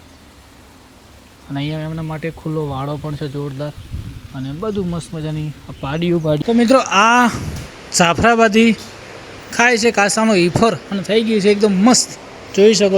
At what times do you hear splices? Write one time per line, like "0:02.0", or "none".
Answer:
0:06.4